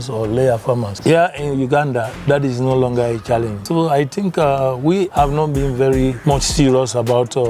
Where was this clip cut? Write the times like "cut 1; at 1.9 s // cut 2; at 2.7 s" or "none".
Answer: cut 1; at 0.9 s // cut 2; at 3.6 s // cut 3; at 5.1 s // cut 4; at 6.2 s